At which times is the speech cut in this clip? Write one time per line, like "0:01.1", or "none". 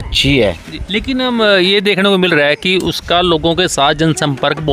none